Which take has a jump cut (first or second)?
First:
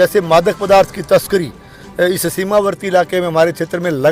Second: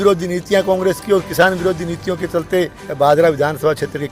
second